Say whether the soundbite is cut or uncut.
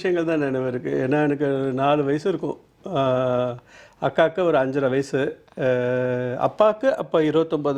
uncut